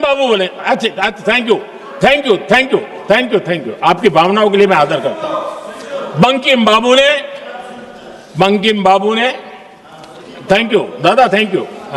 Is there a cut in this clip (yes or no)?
no